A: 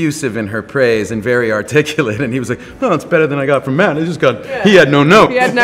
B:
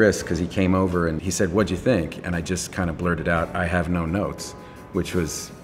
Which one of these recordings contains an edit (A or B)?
B